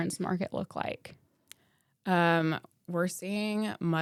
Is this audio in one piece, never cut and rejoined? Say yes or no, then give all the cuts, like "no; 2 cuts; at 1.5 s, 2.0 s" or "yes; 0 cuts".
yes; 0 cuts